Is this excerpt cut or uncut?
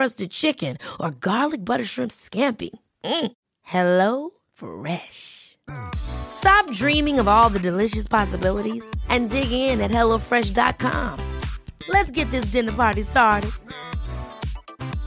uncut